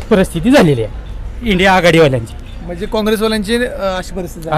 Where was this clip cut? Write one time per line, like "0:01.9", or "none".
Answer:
none